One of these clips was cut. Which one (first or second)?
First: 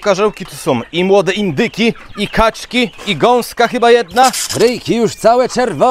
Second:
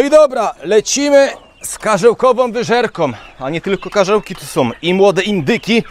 first